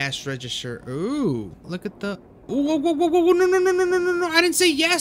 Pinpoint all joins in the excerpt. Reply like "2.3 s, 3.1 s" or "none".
1.6 s

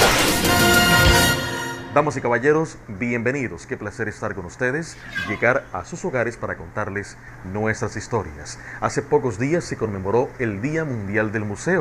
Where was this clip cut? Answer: none

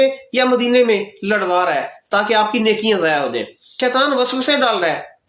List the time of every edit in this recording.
3.6 s

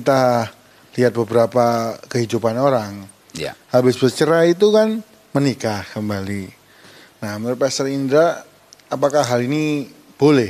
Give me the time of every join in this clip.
none

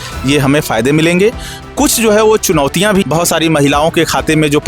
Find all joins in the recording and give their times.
3.0 s

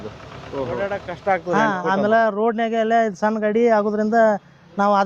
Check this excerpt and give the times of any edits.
0.9 s

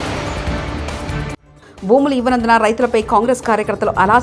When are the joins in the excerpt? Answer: none

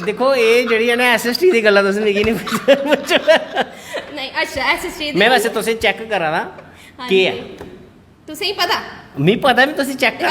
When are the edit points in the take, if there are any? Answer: none

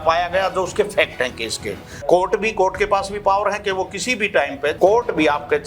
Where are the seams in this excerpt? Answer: 2.0 s, 4.8 s

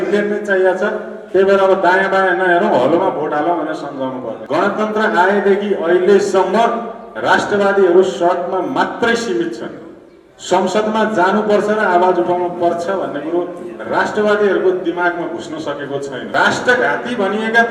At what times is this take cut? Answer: 4.4 s, 16.3 s

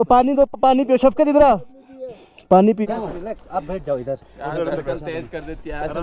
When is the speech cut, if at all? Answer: 2.9 s

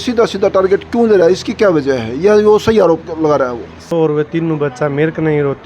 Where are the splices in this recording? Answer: 3.9 s

